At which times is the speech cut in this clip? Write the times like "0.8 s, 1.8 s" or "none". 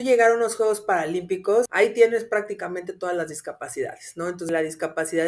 1.7 s, 4.5 s